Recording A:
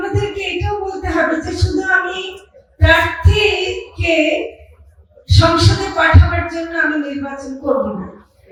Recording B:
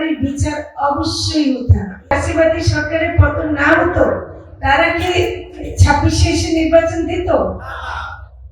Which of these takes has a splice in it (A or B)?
B